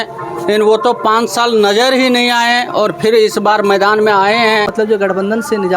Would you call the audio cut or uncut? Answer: cut